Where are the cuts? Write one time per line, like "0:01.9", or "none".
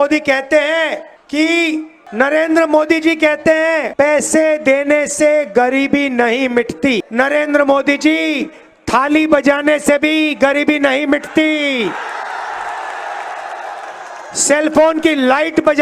0:01.1
0:02.0
0:03.9
0:07.1

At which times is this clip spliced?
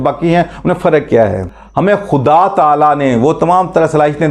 0:01.5

